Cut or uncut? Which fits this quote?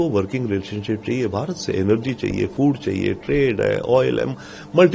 uncut